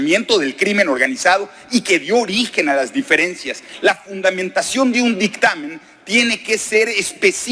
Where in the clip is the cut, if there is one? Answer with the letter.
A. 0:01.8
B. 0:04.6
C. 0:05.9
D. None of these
D